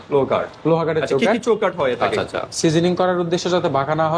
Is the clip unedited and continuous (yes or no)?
no